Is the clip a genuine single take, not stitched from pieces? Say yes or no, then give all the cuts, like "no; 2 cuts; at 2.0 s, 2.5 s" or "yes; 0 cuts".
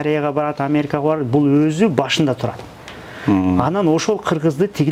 yes; 0 cuts